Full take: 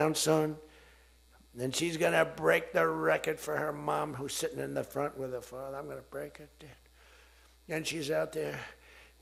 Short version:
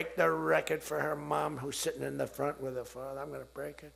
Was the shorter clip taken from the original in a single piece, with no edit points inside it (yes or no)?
yes